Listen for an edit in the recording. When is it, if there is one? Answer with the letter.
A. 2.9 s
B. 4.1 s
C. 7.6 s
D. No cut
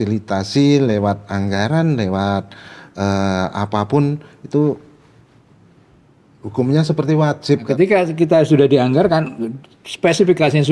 C